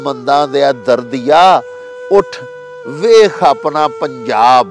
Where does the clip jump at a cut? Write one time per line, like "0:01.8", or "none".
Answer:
none